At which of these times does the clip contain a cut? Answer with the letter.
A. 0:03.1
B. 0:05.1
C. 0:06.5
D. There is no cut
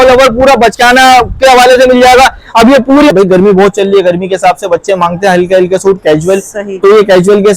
A